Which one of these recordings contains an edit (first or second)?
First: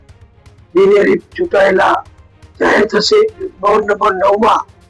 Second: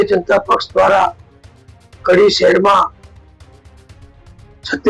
first